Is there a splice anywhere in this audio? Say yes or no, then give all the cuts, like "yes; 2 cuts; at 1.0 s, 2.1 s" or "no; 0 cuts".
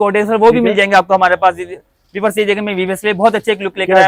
no; 0 cuts